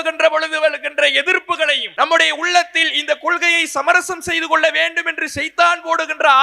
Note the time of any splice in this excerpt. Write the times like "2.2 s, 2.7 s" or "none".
1.8 s